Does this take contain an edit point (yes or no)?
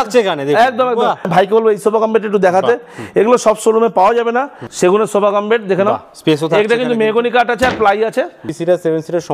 yes